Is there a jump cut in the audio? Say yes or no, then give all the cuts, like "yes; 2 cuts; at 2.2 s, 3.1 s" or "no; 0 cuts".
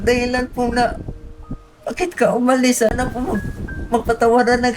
yes; 1 cut; at 2.9 s